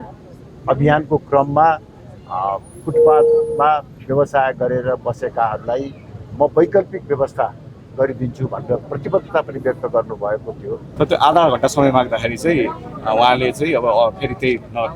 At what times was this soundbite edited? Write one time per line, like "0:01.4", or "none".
0:10.9